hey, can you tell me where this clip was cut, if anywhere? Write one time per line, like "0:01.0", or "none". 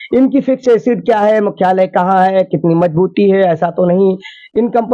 none